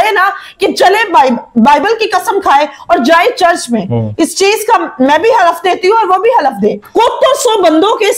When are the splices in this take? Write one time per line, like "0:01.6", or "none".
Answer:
0:06.9